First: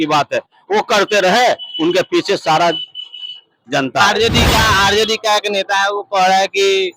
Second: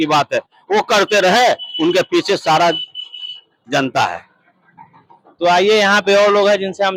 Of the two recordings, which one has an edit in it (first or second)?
first